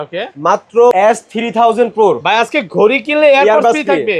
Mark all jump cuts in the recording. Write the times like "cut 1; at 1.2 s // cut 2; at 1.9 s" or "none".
cut 1; at 0.9 s